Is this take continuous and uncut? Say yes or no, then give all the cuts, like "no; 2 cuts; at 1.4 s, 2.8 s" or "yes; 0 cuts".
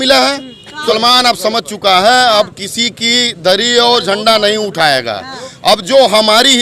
no; 1 cut; at 0.9 s